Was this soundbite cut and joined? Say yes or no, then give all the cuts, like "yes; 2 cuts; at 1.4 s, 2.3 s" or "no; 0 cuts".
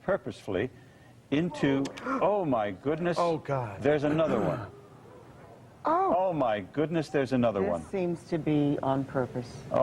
yes; 1 cut; at 1.4 s